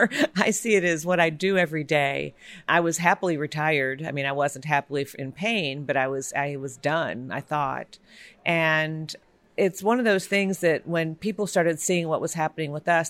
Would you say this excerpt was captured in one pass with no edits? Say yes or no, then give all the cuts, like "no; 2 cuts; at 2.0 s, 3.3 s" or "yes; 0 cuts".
no; 2 cuts; at 2.6 s, 9.5 s